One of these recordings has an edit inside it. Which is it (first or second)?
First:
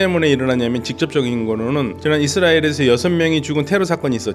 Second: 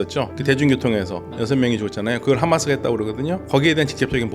second